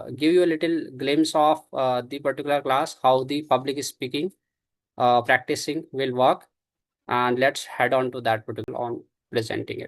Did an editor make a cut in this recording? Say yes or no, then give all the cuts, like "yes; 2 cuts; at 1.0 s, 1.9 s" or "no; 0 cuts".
yes; 1 cut; at 8.7 s